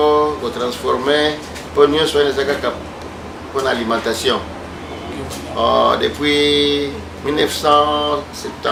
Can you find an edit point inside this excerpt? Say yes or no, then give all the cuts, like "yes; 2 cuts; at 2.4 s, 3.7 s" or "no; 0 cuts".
no; 0 cuts